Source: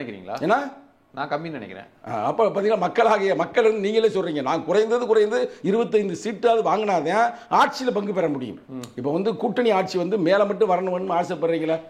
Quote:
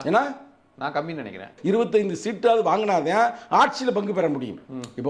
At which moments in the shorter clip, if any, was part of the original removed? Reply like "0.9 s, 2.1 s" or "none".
1.5 s